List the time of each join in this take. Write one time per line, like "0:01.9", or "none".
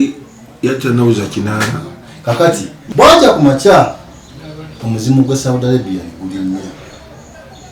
0:02.8